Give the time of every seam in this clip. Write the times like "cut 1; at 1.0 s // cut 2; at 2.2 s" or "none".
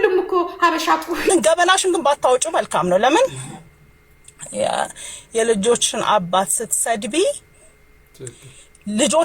cut 1; at 1.3 s